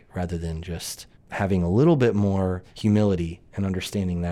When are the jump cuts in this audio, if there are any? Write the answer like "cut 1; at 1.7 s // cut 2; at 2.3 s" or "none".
cut 1; at 1.1 s // cut 2; at 2.7 s